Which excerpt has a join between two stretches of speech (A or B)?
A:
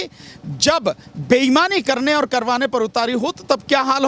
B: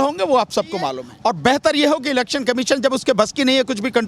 B